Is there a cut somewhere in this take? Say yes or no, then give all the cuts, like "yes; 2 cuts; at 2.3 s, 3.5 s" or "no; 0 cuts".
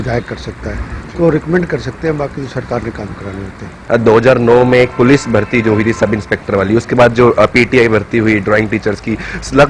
yes; 1 cut; at 3.8 s